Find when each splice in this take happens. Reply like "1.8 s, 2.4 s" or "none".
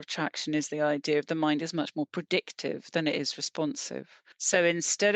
4.1 s